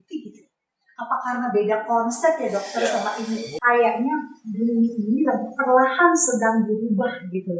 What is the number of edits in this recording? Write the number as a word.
one